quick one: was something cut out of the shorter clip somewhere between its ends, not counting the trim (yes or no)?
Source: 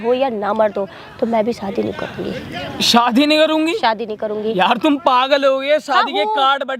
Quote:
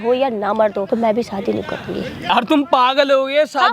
yes